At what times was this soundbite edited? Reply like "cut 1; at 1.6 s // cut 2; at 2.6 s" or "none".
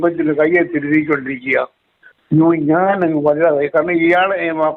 none

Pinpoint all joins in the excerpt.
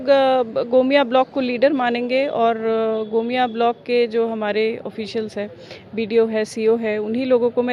none

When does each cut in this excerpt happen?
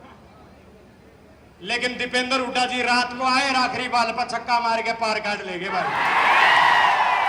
none

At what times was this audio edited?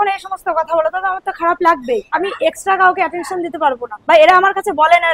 cut 1; at 2.1 s // cut 2; at 3.9 s

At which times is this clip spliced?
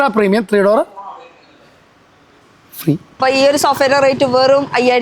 cut 1; at 3.2 s

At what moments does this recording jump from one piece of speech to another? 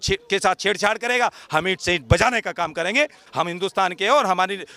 cut 1; at 3.2 s

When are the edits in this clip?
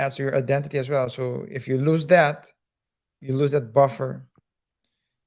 cut 1; at 3.2 s

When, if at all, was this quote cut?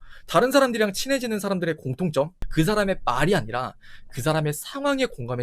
cut 1; at 2.4 s

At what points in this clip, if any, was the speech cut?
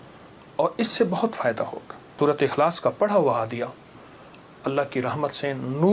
cut 1; at 2.2 s

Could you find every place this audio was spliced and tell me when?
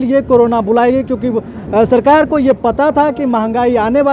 none

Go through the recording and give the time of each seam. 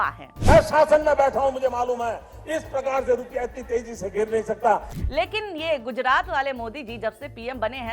cut 1; at 4.9 s

